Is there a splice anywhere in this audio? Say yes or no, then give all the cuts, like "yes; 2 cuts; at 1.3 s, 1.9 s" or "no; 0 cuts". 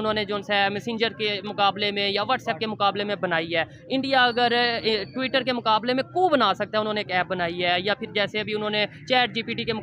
no; 0 cuts